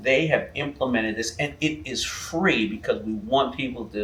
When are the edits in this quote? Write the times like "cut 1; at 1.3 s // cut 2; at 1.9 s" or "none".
none